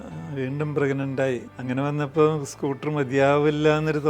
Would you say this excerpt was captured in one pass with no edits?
no; 1 cut; at 1.5 s

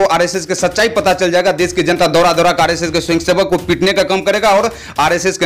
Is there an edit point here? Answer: no; 0 cuts

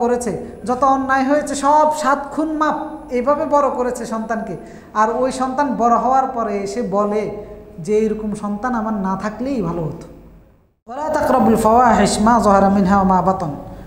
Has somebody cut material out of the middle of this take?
yes; 1 cut; at 11.1 s

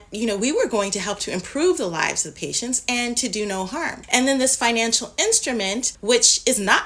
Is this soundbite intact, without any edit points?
no; 2 cuts; at 4.0 s, 5.9 s

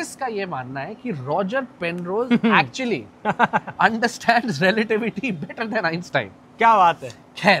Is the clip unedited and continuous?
yes; 0 cuts

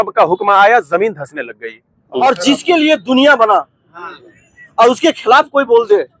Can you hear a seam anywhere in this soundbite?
yes; 1 cut; at 2.2 s

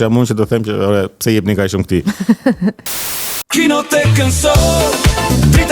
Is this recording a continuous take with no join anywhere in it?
no; 1 cut; at 3.0 s

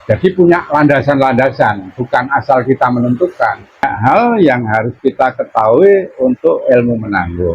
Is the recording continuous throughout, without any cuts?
no; 1 cut; at 3.9 s

